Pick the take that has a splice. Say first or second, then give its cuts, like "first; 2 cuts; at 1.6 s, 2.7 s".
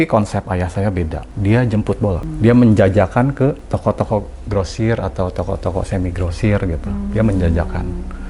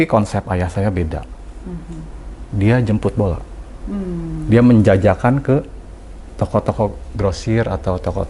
first; 3 cuts; at 1.2 s, 2.3 s, 3.6 s